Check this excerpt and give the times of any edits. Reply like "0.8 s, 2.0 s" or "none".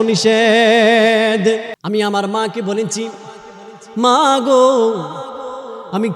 1.7 s